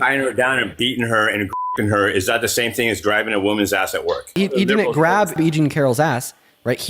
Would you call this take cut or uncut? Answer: cut